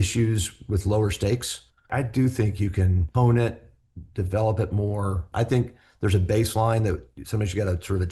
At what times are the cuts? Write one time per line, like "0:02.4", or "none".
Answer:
0:01.9
0:03.0
0:05.2